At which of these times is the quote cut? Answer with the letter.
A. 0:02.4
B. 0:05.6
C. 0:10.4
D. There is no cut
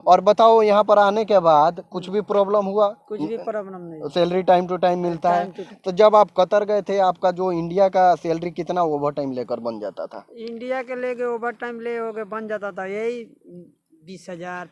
B